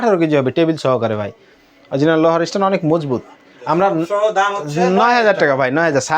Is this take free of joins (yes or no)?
yes